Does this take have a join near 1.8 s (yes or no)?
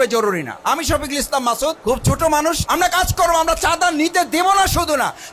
yes